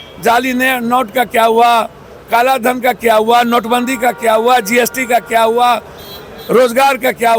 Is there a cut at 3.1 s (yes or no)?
no